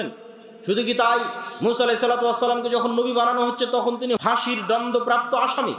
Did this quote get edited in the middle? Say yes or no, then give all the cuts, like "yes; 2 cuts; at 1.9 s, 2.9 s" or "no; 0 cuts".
yes; 1 cut; at 4.2 s